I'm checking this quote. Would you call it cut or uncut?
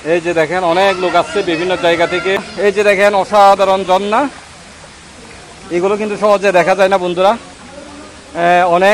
cut